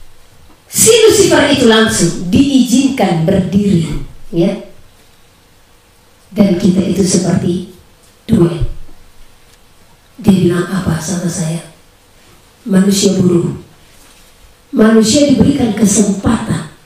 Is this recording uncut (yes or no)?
yes